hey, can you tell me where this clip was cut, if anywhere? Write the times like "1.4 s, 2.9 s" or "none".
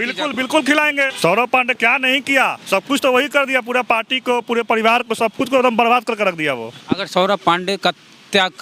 1.1 s, 6.7 s